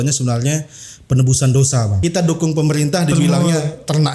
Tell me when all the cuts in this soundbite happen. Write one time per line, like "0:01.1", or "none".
0:01.9